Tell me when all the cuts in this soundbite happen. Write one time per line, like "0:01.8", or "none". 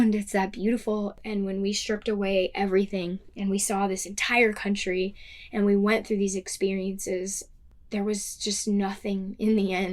0:01.2

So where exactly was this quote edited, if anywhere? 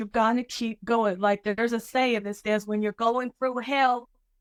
none

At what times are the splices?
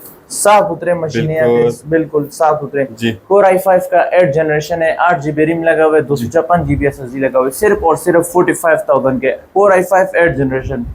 none

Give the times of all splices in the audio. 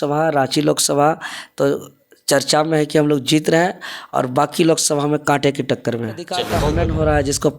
0:06.5

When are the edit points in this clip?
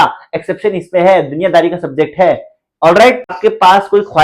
0:03.3

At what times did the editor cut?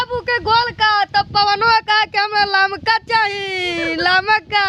none

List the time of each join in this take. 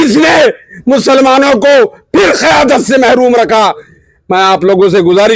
0:04.0

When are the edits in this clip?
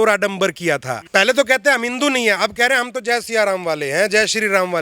0:01.0

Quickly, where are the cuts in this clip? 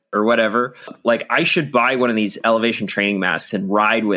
0:00.9

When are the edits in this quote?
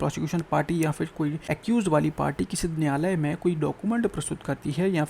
0:01.5

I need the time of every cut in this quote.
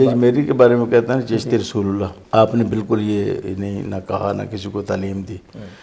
0:02.2

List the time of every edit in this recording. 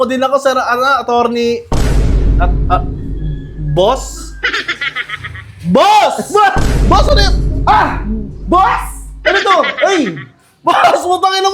none

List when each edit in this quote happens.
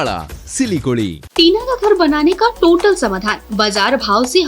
0:01.2

